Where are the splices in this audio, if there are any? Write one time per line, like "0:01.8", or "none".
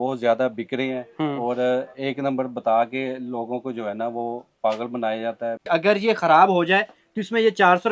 0:05.6